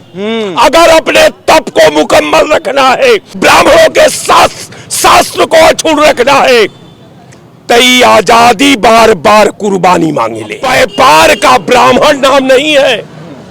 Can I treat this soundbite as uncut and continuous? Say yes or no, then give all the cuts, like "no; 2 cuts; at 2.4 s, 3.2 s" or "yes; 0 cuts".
no; 2 cuts; at 3.3 s, 10.6 s